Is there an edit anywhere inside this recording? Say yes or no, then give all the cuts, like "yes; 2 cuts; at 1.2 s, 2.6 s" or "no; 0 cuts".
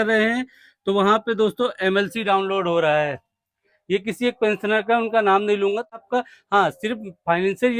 yes; 1 cut; at 6.0 s